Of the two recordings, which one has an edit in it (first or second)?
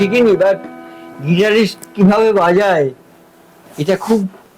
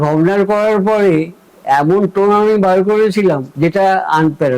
second